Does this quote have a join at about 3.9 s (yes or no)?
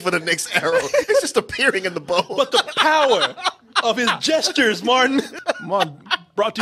no